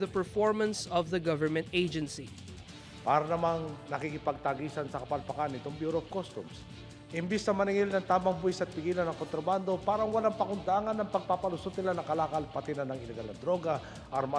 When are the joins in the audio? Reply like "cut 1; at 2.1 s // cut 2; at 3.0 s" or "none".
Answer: none